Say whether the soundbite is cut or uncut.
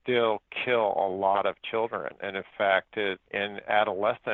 uncut